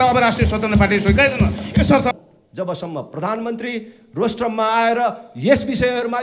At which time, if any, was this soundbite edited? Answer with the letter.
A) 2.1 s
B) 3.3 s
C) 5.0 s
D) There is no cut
A